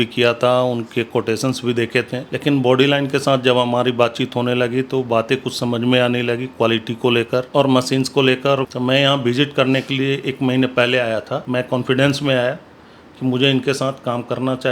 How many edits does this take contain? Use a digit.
4